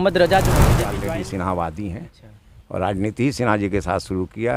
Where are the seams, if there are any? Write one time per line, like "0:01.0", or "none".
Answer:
0:00.9